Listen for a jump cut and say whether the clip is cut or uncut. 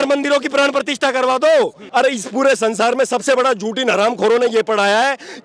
cut